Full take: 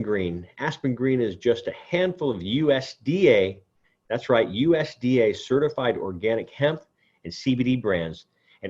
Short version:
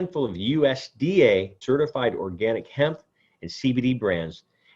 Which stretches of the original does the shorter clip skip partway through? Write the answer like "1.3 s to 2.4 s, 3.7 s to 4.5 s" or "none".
3.6 s to 5.4 s